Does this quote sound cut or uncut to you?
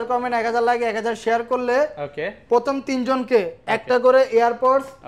uncut